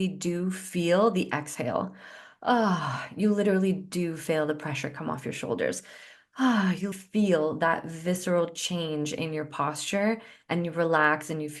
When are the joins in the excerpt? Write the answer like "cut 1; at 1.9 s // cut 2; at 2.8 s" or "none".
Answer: cut 1; at 6.9 s